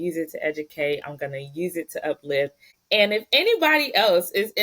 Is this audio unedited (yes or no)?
no